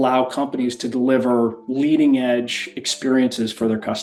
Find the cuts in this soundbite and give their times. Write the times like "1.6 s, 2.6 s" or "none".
none